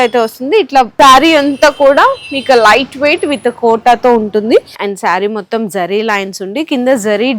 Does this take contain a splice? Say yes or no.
yes